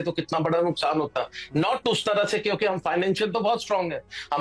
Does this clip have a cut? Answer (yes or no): no